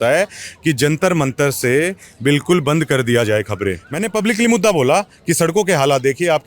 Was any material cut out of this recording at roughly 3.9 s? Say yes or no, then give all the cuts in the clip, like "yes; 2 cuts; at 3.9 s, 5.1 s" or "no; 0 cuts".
yes; 1 cut; at 3.9 s